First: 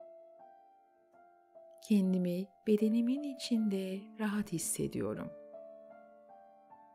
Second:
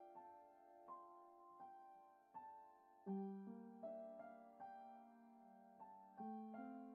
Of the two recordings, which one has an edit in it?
first; 2 cuts; at 1.8 s, 5.3 s

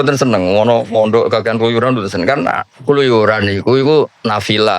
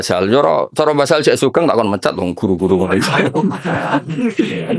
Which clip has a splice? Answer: first; 1 cut; at 2.7 s

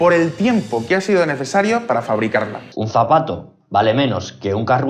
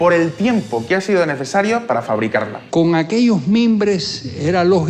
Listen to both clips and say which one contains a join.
second; 1 cut; at 2.6 s

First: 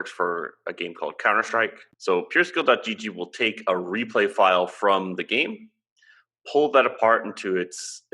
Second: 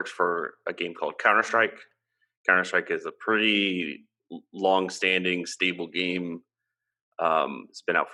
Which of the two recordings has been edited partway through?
first; 1 cut; at 1.9 s

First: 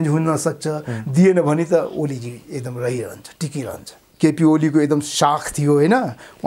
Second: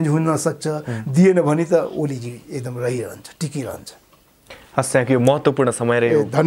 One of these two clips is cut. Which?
first; 1 cut; at 4.0 s

